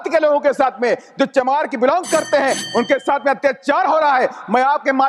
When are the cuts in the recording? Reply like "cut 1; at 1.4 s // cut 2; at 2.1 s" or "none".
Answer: none